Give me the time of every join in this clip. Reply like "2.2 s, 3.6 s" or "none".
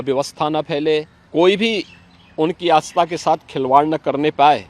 1.2 s